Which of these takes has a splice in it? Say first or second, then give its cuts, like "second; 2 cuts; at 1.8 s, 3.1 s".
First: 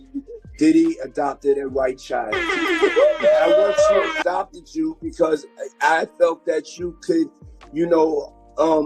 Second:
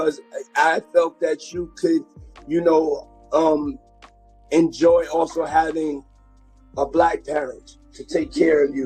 first; 1 cut; at 4.1 s